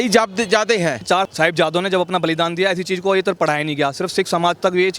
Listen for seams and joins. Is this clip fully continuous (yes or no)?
no